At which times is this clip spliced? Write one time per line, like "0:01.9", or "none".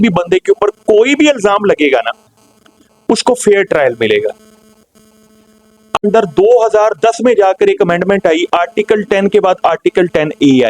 0:06.0